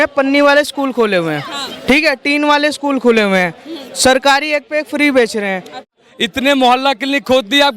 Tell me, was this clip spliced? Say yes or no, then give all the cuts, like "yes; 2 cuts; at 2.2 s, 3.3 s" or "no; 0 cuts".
yes; 1 cut; at 5.8 s